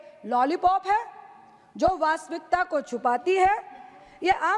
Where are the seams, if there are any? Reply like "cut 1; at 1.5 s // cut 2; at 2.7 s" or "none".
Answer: none